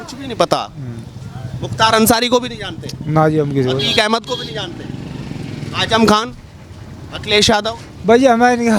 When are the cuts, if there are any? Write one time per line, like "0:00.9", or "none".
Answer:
none